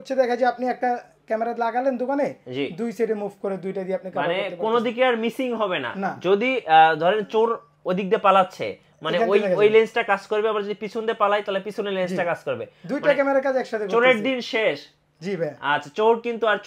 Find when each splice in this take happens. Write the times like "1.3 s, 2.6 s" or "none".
none